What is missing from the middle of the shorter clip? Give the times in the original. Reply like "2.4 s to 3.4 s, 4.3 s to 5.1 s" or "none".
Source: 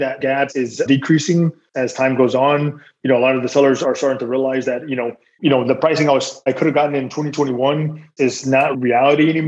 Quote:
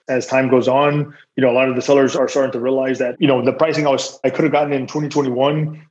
4.8 s to 5.3 s